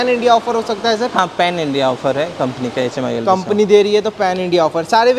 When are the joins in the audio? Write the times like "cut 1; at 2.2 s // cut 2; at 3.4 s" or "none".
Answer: none